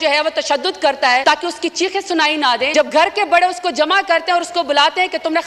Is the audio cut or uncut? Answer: cut